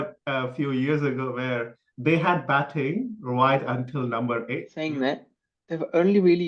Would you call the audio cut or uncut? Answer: cut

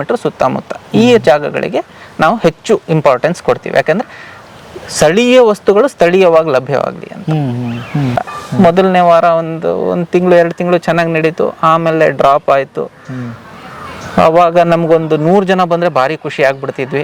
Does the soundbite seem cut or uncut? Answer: cut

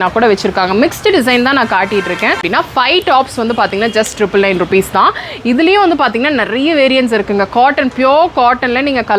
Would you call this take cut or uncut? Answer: cut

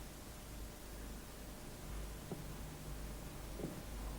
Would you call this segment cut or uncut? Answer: uncut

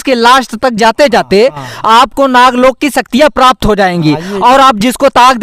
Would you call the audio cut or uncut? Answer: uncut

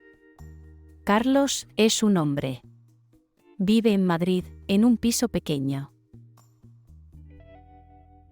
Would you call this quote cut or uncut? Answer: cut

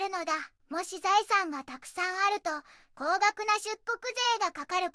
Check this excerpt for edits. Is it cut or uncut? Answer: uncut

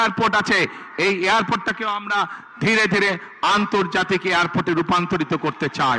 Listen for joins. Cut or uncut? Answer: uncut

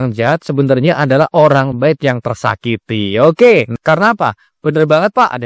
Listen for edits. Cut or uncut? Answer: cut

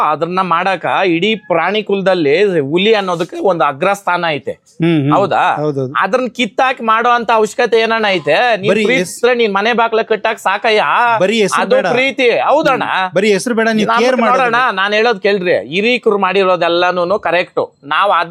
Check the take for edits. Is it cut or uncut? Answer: uncut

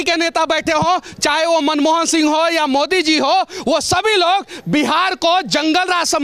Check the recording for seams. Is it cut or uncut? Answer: uncut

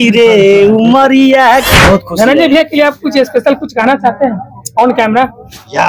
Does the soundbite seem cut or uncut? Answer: cut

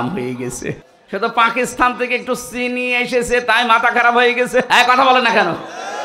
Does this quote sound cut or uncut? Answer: cut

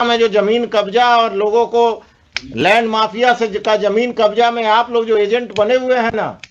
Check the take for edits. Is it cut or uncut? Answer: uncut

